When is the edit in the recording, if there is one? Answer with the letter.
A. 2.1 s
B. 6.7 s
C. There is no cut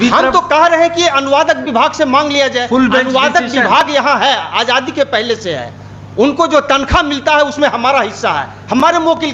C